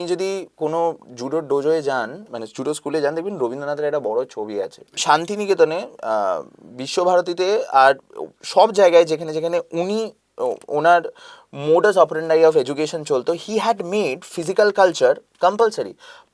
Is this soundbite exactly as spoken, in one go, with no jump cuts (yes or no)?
no